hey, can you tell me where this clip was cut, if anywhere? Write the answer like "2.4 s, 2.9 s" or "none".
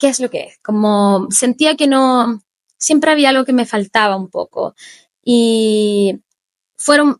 none